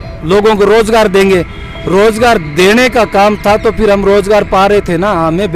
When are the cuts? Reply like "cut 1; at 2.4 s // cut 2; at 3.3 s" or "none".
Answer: none